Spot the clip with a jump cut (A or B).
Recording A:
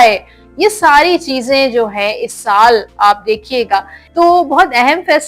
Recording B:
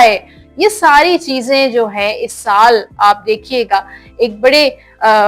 A